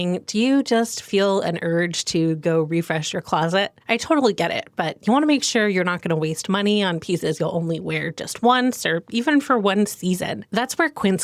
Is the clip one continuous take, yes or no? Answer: yes